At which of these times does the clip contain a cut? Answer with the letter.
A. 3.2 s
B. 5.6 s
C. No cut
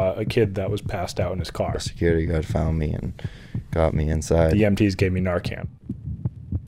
B